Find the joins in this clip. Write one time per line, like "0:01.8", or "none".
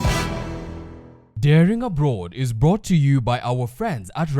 none

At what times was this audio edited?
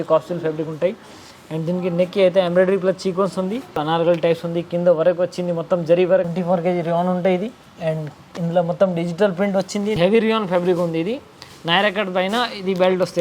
0:03.8
0:06.3
0:10.0

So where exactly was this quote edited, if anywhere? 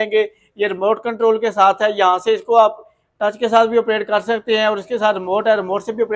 none

